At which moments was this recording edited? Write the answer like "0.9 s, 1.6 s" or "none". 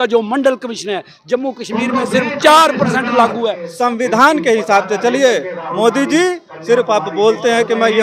3.6 s